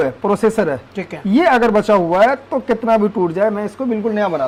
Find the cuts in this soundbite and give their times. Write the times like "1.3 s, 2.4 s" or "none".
none